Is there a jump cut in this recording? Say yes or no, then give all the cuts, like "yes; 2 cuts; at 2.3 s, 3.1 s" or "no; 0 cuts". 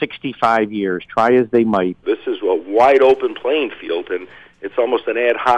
yes; 1 cut; at 2.0 s